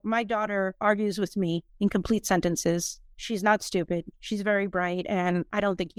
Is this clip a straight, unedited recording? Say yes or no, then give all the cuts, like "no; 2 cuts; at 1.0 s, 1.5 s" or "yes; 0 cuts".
yes; 0 cuts